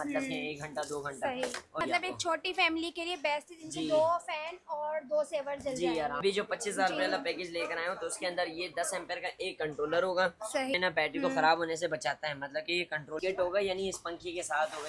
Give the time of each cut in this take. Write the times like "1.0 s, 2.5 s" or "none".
1.8 s, 6.2 s, 10.7 s, 13.2 s